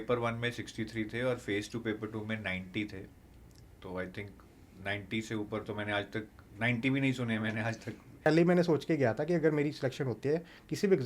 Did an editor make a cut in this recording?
yes; 1 cut; at 8.2 s

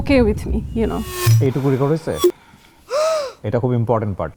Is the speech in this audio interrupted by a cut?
no; 0 cuts

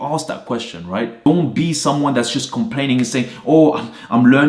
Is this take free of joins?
no; 1 cut; at 1.3 s

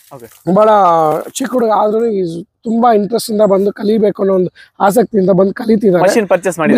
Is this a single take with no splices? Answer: yes; 0 cuts

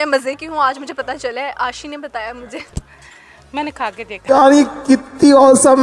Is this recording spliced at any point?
no; 0 cuts

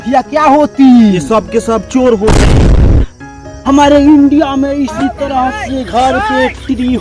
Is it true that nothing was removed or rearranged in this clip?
no; 2 cuts; at 2.2 s, 3.5 s

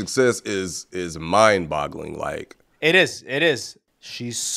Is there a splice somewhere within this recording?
yes; 1 cut; at 3.5 s

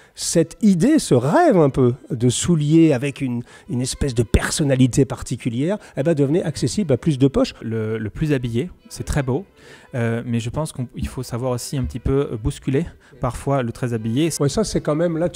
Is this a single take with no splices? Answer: no; 2 cuts; at 7.6 s, 14.3 s

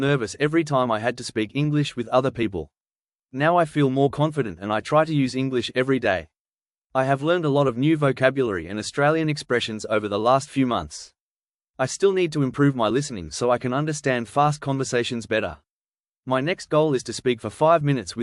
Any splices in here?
yes; 4 cuts; at 3.2 s, 6.8 s, 11.6 s, 16.1 s

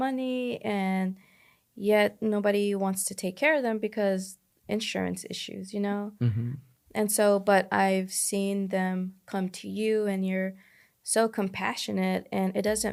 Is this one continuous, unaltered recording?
yes; 0 cuts

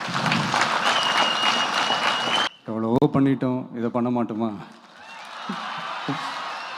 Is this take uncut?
no; 1 cut; at 2.4 s

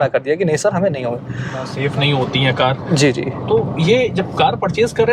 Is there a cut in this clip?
yes; 1 cut; at 1.7 s

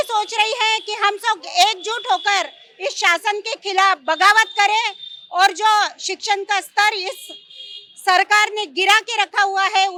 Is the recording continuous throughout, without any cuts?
yes; 0 cuts

